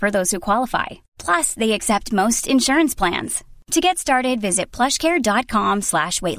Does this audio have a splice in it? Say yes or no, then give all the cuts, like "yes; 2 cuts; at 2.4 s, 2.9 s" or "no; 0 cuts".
no; 0 cuts